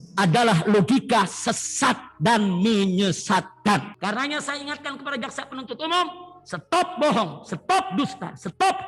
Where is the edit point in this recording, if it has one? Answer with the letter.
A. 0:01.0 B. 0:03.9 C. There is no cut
B